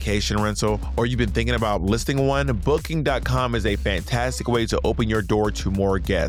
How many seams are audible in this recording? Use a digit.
0